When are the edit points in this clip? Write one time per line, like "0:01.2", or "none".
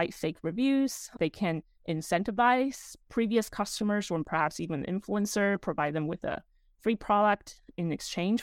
0:01.1